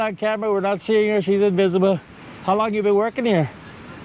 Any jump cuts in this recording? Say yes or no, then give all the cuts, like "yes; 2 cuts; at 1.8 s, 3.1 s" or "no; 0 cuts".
no; 0 cuts